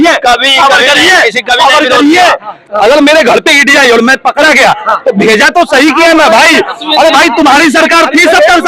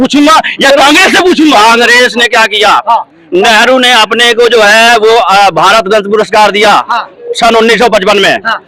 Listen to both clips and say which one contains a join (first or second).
first